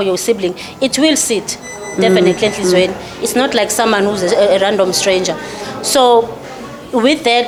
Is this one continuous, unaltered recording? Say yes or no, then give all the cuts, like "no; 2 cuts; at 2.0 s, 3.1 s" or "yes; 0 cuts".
yes; 0 cuts